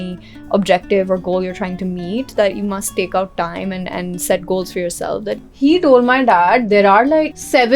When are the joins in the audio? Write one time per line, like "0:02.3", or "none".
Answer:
0:05.4